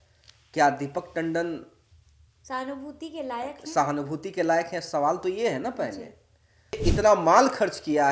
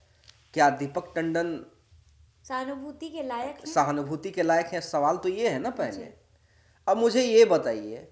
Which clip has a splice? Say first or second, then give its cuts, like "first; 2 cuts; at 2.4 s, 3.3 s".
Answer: first; 1 cut; at 6.8 s